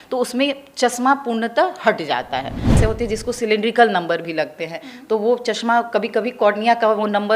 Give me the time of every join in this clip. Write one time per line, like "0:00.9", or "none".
0:02.8

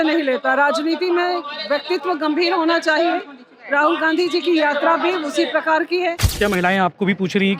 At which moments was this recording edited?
0:06.3

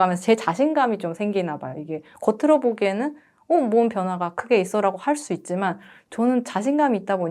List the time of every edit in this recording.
none

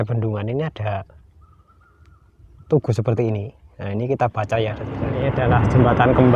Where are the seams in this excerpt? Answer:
0:05.1

